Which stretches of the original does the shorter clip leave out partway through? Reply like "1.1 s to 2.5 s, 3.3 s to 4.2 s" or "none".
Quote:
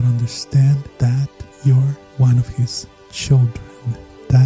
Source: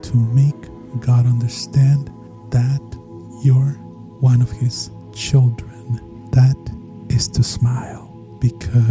2.4 s to 2.9 s, 3.8 s to 4.1 s